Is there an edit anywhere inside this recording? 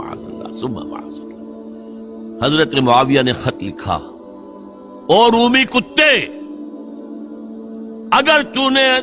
yes; 1 cut; at 2.4 s

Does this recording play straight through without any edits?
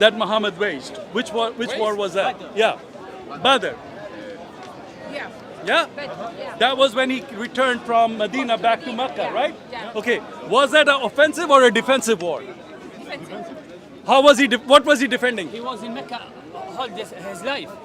yes; 0 cuts

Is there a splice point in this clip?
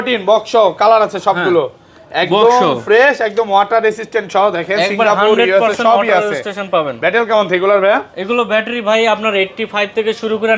no; 0 cuts

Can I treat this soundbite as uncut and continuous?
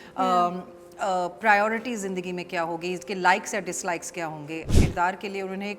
no; 1 cut; at 4.7 s

